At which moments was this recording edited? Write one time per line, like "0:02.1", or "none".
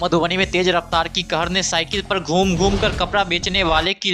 none